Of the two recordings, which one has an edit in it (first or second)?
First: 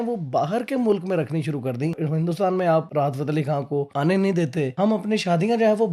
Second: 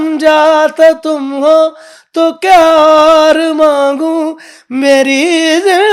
first